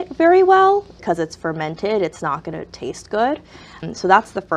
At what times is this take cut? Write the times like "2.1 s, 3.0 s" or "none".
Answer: 0.9 s, 3.8 s